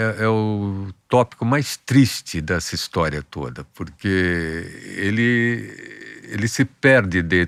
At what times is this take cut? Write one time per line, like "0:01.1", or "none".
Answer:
none